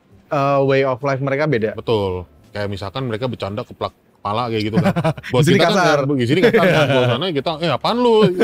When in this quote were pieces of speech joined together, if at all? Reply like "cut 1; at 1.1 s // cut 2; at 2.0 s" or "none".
none